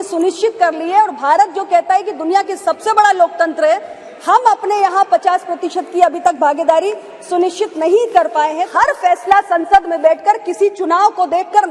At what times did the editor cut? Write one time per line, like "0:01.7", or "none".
0:08.6